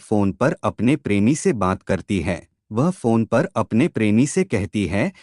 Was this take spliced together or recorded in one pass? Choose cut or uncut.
cut